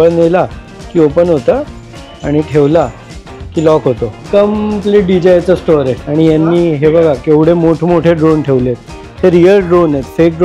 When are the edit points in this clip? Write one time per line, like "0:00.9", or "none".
0:04.1
0:06.0